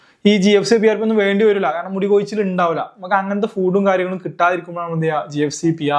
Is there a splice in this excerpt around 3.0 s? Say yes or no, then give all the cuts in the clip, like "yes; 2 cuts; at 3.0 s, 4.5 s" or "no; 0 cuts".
no; 0 cuts